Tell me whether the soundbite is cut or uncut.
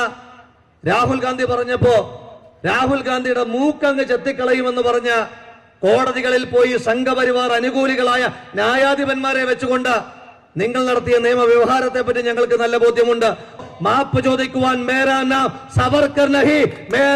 cut